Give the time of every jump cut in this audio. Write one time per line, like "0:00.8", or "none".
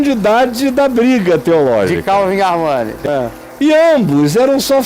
0:03.0